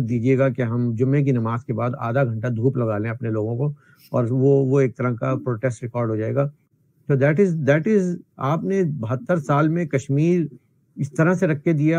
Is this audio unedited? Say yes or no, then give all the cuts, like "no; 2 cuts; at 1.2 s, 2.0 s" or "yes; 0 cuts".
yes; 0 cuts